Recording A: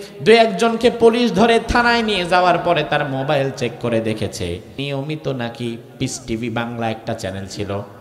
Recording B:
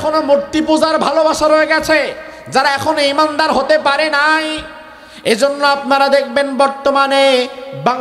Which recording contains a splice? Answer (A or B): A